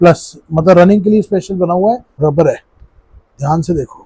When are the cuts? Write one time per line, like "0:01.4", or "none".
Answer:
0:02.2